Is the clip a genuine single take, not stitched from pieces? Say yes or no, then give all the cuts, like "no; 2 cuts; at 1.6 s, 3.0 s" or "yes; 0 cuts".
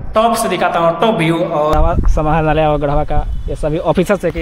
no; 1 cut; at 1.7 s